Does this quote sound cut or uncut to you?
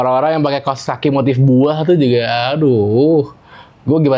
uncut